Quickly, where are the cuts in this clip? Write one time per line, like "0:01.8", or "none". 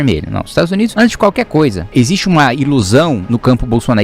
0:00.9
0:01.9
0:03.2